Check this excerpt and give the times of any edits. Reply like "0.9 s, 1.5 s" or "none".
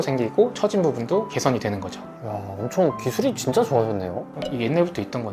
none